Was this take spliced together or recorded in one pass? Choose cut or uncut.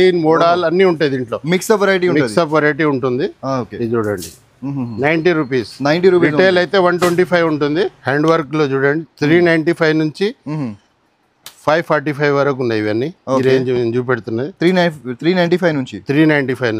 cut